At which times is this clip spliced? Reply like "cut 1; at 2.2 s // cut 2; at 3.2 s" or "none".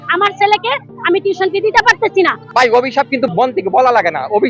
cut 1; at 2.4 s // cut 2; at 3.3 s

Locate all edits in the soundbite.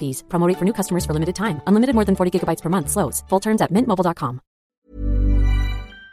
cut 1; at 4.9 s

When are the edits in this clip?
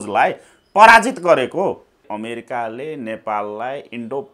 cut 1; at 2.1 s

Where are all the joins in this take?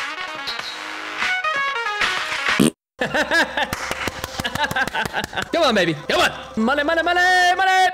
none

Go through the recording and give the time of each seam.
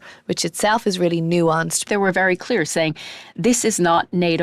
cut 1; at 1.9 s

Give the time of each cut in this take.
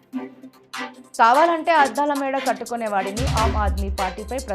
cut 1; at 1.0 s

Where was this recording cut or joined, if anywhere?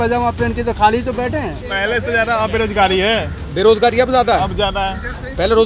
cut 1; at 1.6 s

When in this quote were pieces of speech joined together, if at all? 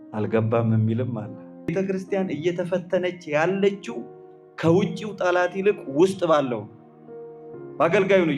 cut 1; at 1.7 s

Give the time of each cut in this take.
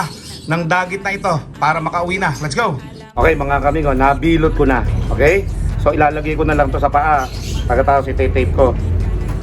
cut 1; at 3.2 s

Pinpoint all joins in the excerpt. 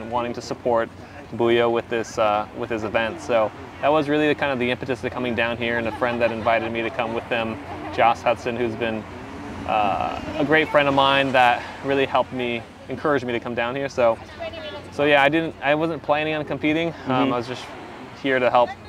none

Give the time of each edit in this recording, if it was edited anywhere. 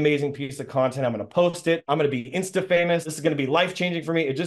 cut 1; at 1.8 s

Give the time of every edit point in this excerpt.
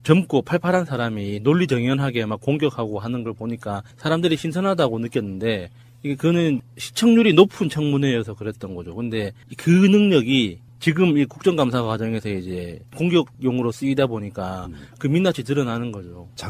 none

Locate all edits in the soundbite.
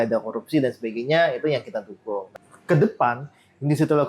cut 1; at 2.3 s

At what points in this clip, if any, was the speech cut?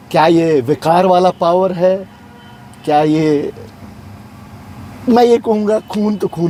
none

